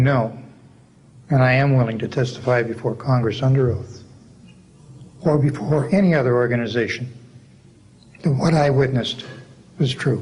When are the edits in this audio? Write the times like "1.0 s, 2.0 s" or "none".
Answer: none